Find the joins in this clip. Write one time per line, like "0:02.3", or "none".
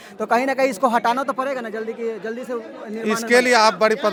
none